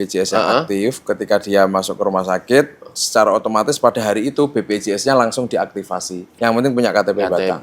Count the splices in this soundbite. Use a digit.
1